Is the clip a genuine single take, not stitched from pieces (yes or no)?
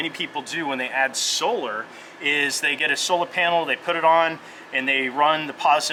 yes